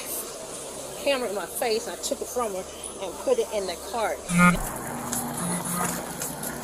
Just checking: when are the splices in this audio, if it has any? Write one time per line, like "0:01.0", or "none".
0:04.5

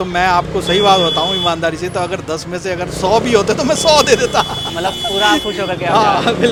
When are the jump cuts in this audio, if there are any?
none

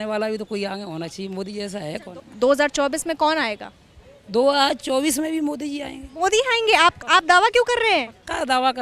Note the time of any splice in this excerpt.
0:02.1

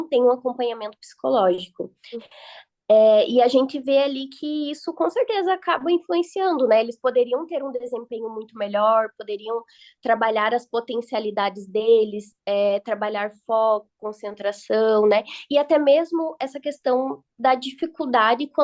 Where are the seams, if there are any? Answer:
0:02.3

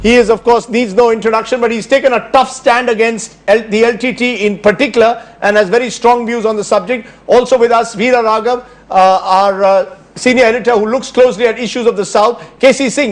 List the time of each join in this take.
0:10.2

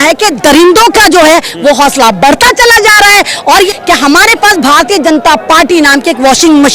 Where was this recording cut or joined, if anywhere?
0:03.7

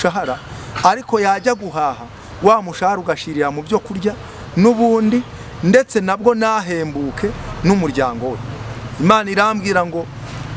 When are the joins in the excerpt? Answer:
none

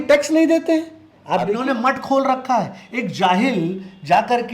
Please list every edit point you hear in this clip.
0:01.6

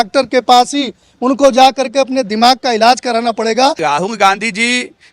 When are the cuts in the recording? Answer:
0:03.8

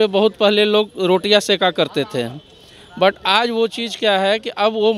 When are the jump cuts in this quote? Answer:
none

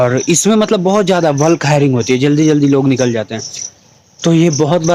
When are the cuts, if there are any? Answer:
none

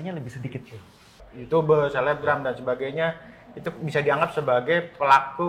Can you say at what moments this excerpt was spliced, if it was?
0:01.3

